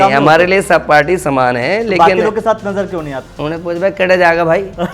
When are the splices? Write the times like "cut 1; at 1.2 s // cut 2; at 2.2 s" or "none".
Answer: cut 1; at 3.2 s